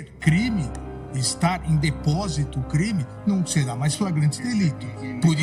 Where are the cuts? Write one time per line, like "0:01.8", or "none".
none